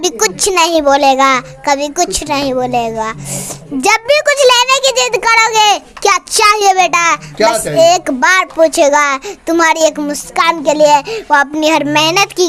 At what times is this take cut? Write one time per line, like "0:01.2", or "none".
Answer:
none